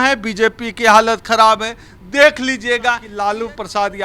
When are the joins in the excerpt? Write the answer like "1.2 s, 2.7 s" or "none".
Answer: 3.1 s